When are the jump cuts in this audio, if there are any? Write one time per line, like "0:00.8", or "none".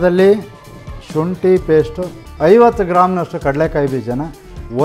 0:02.2